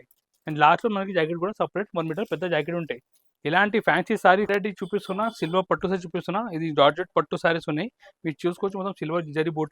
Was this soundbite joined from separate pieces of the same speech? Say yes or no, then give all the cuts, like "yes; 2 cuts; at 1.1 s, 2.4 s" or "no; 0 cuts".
yes; 1 cut; at 4.5 s